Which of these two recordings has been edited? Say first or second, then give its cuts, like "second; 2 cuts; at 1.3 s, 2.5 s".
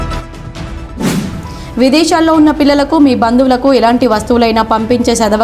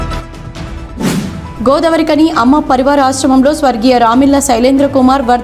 first; 1 cut; at 1.1 s